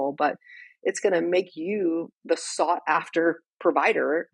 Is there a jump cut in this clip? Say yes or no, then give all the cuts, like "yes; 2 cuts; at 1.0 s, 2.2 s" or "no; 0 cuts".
no; 0 cuts